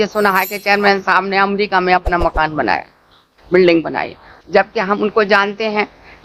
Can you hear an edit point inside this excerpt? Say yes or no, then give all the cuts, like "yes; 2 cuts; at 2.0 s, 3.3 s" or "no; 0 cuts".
no; 0 cuts